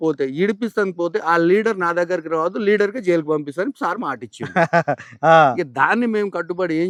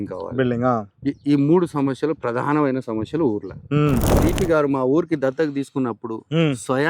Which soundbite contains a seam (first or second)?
second